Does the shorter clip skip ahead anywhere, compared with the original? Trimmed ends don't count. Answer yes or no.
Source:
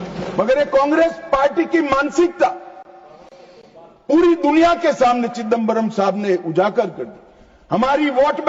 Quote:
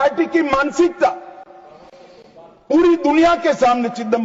no